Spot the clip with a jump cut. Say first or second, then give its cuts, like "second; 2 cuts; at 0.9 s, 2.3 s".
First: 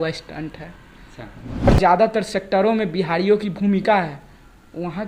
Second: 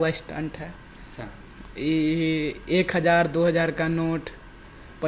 first; 1 cut; at 1.7 s